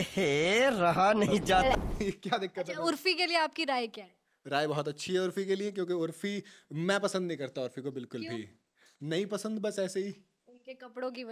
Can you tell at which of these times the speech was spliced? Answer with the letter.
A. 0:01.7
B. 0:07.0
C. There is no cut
A